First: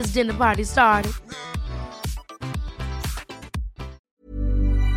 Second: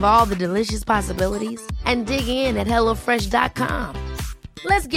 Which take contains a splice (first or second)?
first